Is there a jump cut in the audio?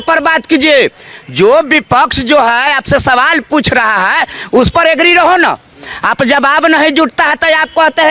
no; 0 cuts

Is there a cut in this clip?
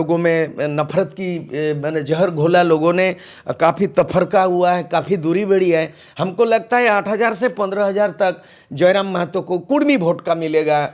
no; 0 cuts

